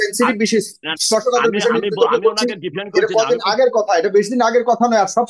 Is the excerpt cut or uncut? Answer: uncut